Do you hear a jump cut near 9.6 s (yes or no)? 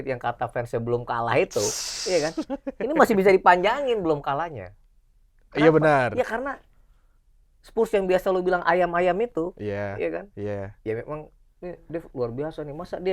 no